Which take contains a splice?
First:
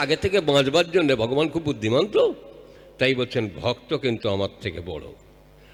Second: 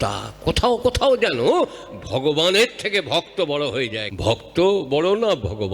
second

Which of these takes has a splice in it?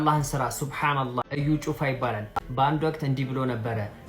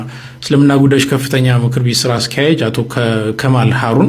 first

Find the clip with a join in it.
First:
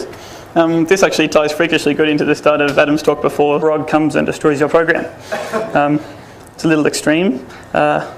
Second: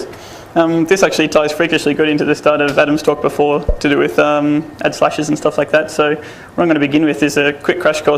second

